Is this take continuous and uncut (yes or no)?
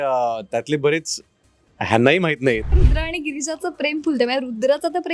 no